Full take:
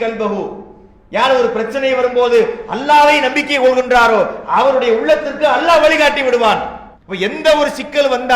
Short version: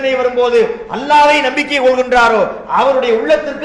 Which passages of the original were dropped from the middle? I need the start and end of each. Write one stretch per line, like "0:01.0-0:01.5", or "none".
none